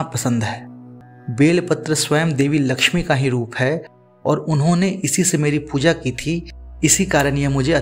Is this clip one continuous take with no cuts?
no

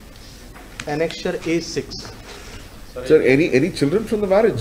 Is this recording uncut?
yes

